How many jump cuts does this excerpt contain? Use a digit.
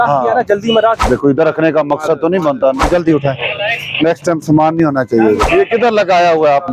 3